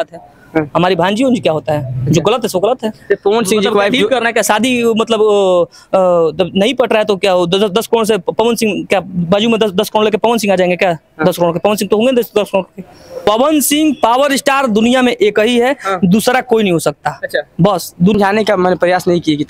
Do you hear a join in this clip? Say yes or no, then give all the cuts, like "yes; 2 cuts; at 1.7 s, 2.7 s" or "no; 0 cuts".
yes; 2 cuts; at 13.1 s, 18.1 s